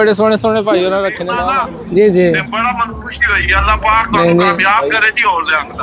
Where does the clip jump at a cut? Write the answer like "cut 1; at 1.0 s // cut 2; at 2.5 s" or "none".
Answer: cut 1; at 1.4 s

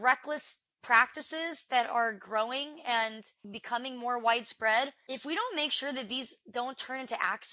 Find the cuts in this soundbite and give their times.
cut 1; at 3.5 s // cut 2; at 5.0 s

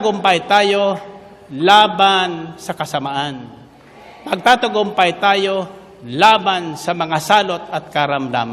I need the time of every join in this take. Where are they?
none

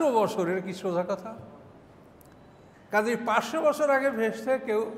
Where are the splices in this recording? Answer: none

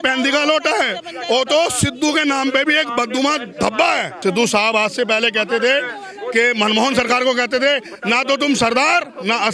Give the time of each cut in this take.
cut 1; at 4.1 s

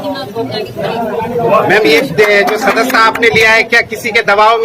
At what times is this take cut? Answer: none

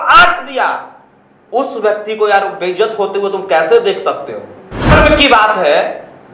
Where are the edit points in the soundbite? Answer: cut 1; at 4.9 s

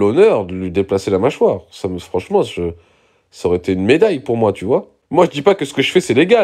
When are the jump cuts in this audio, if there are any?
cut 1; at 5.0 s

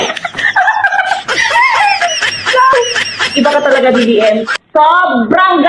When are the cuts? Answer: cut 1; at 2.7 s

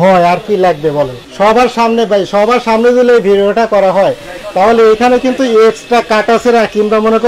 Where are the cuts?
cut 1; at 1.2 s

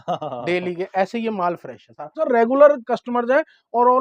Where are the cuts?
cut 1; at 2.2 s

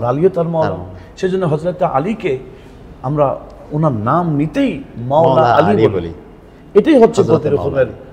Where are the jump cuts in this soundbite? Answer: none

